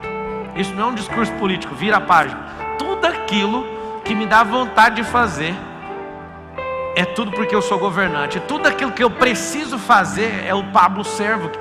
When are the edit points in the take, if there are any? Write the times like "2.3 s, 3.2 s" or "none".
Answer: none